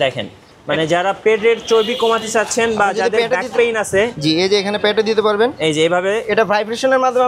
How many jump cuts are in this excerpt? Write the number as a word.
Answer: zero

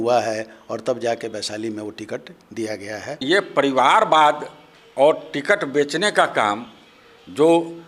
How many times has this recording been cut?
one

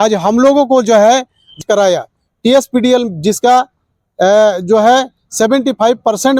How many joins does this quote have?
one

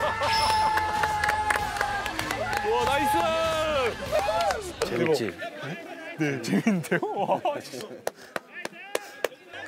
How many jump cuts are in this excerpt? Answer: one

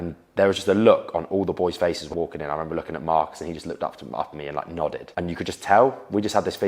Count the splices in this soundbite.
two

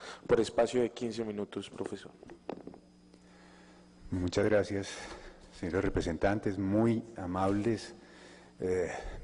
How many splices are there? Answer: one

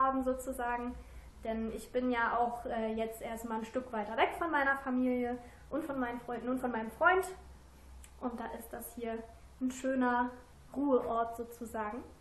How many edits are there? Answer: one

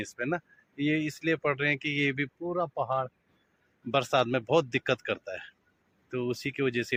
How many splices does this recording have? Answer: zero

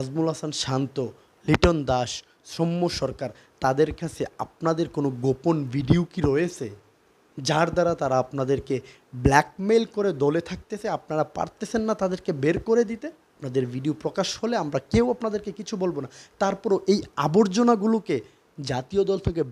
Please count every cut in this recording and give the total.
one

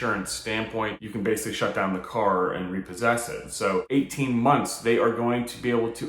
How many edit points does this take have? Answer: two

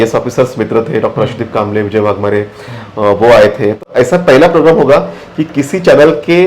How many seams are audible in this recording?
one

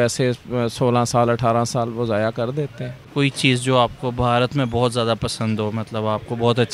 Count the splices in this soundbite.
one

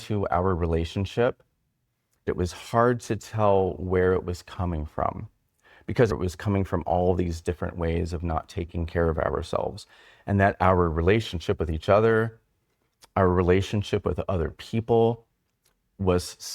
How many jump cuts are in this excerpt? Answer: two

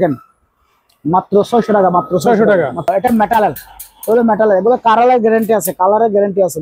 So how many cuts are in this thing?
one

